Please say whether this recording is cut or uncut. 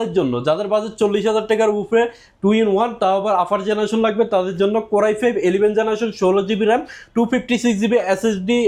uncut